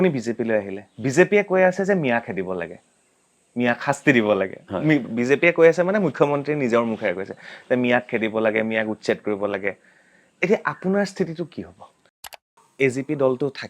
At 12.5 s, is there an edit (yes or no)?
yes